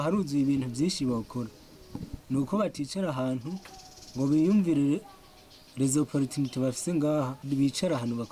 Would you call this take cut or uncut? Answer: cut